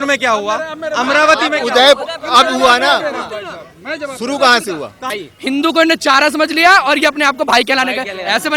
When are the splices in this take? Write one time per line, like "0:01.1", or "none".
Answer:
0:05.2